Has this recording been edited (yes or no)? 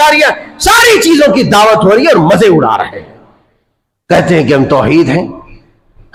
no